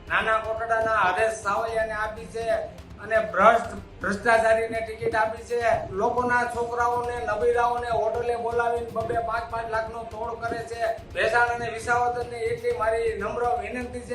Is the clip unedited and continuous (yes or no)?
no